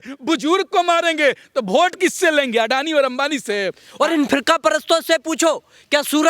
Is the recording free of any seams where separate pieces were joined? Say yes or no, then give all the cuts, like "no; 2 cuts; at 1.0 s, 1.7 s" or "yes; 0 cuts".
no; 1 cut; at 3.8 s